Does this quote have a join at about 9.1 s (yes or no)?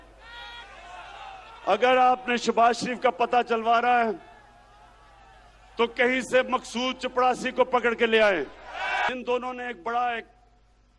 yes